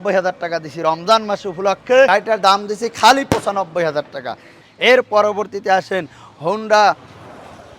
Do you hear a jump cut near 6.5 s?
no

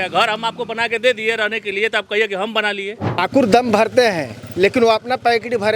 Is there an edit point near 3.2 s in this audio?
yes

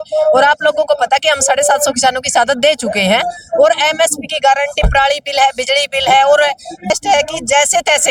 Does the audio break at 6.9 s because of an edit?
yes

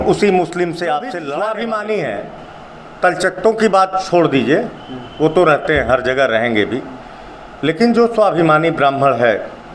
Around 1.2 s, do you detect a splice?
yes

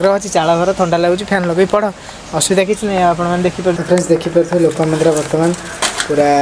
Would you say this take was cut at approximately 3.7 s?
yes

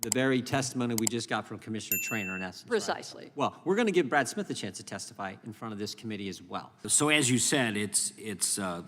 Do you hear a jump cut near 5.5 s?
no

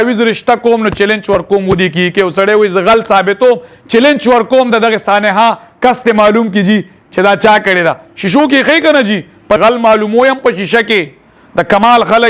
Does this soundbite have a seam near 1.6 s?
no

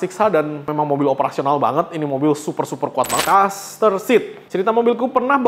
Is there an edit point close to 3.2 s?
yes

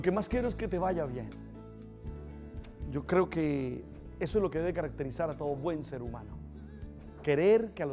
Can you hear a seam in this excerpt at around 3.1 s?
yes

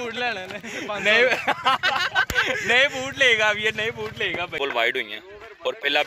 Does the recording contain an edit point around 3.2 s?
no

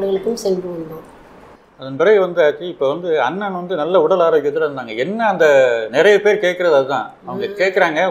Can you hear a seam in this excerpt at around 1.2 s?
no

